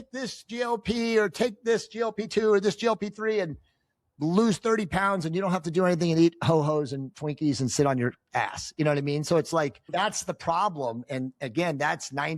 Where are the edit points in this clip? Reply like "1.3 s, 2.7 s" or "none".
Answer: 9.8 s